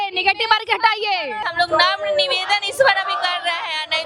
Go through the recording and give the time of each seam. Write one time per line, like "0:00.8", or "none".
0:01.4